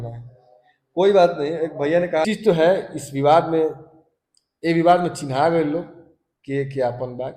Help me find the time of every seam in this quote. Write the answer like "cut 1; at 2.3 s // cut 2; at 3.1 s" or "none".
cut 1; at 2.3 s